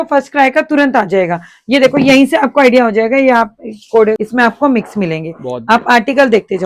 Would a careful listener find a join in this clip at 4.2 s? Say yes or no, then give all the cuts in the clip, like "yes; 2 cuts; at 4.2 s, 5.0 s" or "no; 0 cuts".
yes; 1 cut; at 4.2 s